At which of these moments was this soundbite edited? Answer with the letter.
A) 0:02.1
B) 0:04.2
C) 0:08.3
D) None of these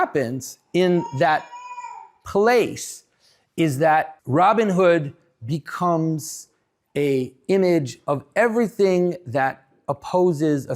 B